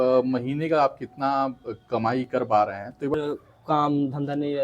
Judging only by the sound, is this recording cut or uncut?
cut